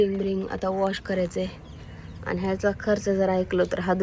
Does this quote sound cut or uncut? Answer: uncut